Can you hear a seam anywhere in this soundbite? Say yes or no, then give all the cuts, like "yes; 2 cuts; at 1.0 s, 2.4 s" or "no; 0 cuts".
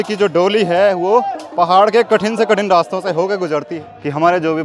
yes; 1 cut; at 3.7 s